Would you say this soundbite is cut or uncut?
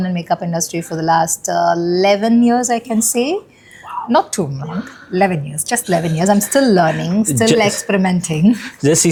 uncut